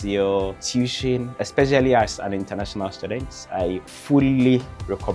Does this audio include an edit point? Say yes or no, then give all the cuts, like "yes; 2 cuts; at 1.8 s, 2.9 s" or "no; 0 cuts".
yes; 2 cuts; at 1.1 s, 4.0 s